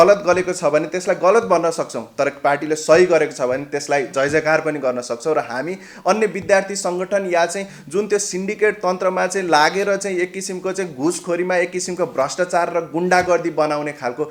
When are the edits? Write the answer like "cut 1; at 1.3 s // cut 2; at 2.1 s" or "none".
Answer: none